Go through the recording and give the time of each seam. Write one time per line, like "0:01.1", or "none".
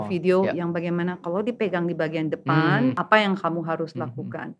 none